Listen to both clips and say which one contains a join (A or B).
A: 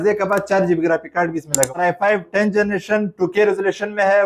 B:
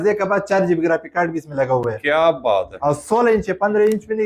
A